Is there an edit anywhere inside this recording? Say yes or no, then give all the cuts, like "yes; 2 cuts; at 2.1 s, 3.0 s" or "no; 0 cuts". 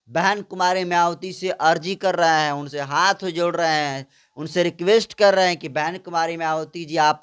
no; 0 cuts